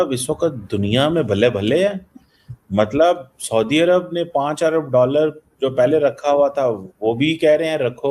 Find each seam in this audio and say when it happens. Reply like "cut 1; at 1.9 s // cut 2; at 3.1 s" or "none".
none

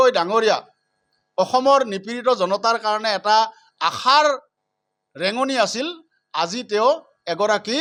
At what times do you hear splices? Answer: none

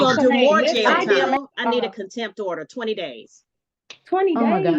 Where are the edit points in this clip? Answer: cut 1; at 1.4 s

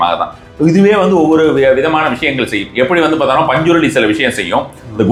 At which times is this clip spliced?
none

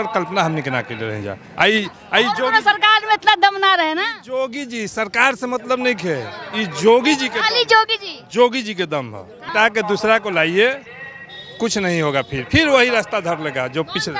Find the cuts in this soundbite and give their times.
cut 1; at 9.5 s

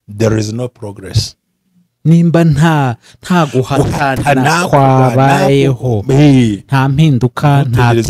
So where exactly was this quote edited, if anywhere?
none

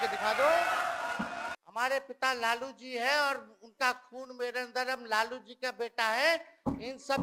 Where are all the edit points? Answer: cut 1; at 1.6 s

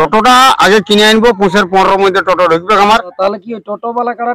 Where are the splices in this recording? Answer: cut 1; at 3.1 s

